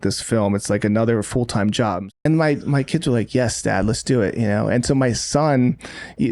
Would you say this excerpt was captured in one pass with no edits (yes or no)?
no